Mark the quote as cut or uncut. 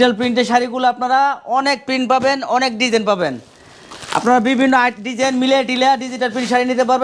uncut